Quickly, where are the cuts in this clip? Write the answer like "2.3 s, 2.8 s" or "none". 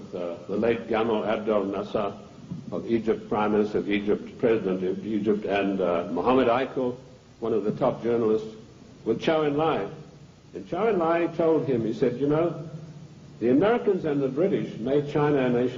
7.6 s